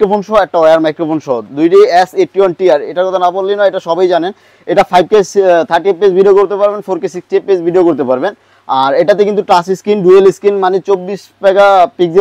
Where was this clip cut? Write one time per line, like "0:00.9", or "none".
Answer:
none